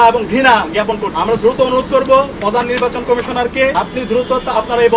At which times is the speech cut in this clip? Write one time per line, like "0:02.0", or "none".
0:01.1
0:03.7